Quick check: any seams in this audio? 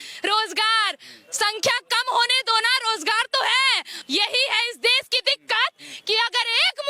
yes; 1 cut; at 3.9 s

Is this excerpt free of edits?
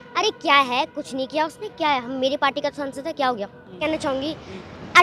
no; 1 cut; at 3.8 s

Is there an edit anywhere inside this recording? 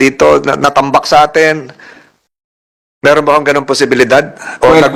no; 0 cuts

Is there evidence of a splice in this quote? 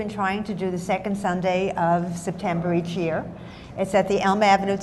no; 0 cuts

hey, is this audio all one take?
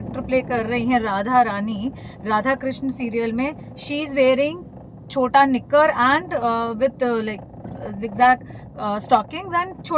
yes; 0 cuts

